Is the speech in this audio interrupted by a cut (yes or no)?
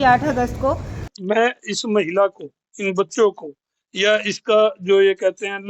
yes